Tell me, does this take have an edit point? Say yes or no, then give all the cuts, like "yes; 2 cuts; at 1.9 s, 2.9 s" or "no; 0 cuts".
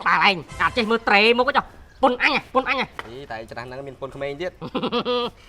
no; 0 cuts